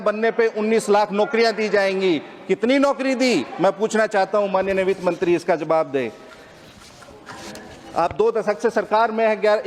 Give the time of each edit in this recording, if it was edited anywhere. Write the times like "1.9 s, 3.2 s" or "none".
none